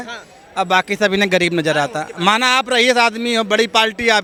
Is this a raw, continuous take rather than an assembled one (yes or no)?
yes